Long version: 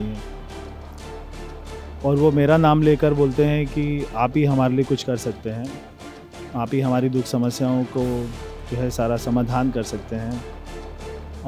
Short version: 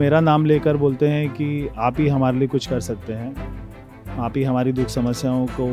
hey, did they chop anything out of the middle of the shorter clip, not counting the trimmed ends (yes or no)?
no